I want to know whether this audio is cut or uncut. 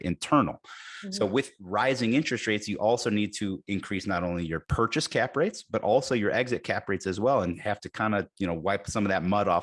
cut